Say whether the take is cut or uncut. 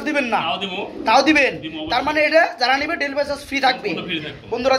uncut